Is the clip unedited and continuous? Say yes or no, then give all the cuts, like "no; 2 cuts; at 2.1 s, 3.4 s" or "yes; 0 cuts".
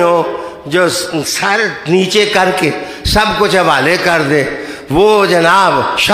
yes; 0 cuts